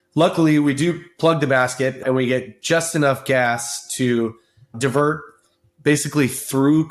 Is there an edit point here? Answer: yes; 2 cuts; at 2.0 s, 4.8 s

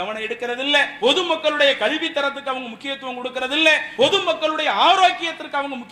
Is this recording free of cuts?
no; 2 cuts; at 0.9 s, 3.9 s

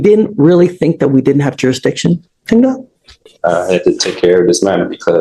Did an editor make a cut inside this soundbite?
no; 0 cuts

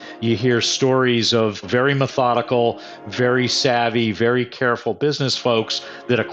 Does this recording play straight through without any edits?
no; 1 cut; at 1.6 s

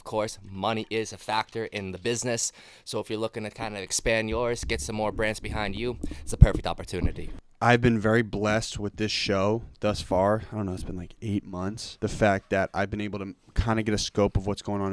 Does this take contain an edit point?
yes; 2 cuts; at 7.3 s, 11.9 s

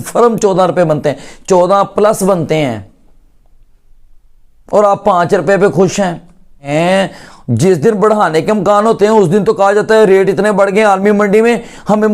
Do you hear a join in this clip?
yes; 1 cut; at 6.7 s

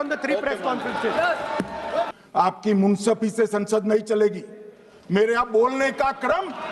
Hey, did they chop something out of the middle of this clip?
yes; 1 cut; at 2.1 s

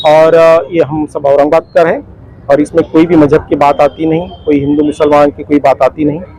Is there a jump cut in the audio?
no; 0 cuts

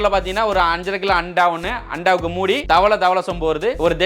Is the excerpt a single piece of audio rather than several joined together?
yes; 0 cuts

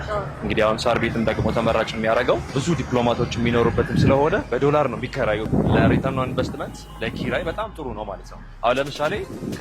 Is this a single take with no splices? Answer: no; 3 cuts; at 2.6 s, 4.4 s, 5.5 s

